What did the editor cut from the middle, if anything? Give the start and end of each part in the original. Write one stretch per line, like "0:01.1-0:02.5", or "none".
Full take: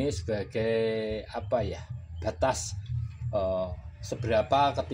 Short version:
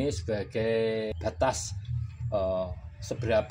0:01.1-0:02.1